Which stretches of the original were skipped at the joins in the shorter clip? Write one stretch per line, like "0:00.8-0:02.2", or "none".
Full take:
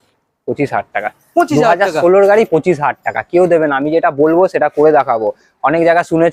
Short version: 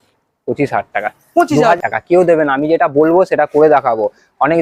0:01.8-0:03.0